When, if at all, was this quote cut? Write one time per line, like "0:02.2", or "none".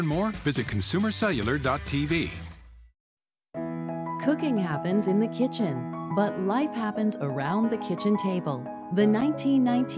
0:02.6

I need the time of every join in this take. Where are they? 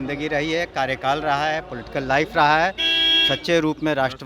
none

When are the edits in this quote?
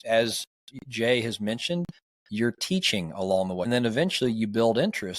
0:03.7

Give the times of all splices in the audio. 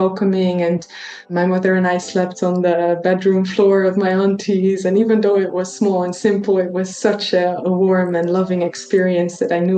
0:01.3

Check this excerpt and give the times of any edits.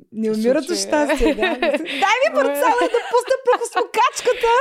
none

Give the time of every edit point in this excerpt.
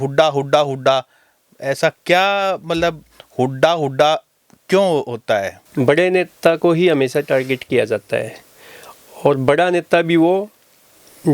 0:05.6

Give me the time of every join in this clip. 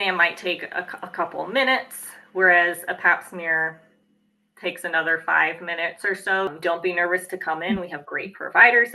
0:06.5

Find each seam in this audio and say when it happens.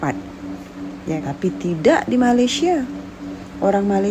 0:01.2

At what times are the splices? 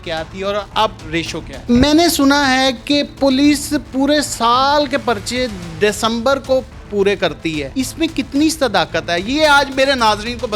0:01.4
0:07.6

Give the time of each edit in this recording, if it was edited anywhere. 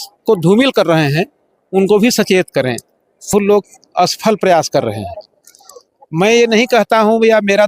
0:03.3

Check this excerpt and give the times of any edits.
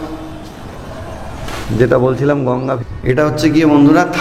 0:02.8

